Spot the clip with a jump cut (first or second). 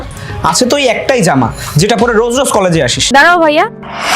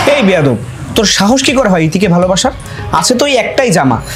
first